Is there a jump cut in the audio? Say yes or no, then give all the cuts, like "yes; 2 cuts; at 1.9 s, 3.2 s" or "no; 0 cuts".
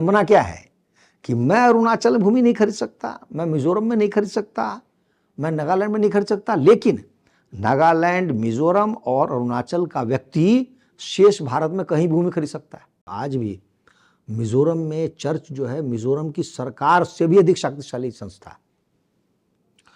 yes; 1 cut; at 13.1 s